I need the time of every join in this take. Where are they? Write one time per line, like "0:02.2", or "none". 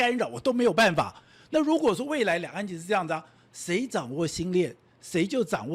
none